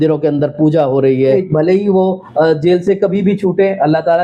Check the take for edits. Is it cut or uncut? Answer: cut